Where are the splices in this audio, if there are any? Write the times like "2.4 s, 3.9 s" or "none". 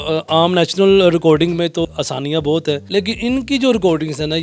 1.8 s, 2.8 s